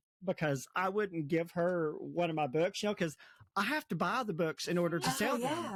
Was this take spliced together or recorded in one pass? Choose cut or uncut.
uncut